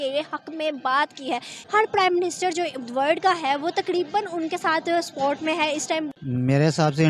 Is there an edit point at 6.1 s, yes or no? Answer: yes